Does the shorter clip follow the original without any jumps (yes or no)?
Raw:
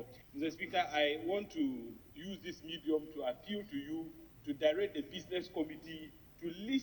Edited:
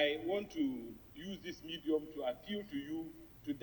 yes